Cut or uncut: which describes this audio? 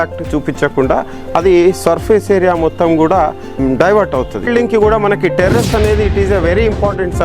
cut